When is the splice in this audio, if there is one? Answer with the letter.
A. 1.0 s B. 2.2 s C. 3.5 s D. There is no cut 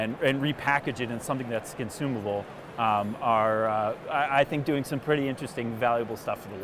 D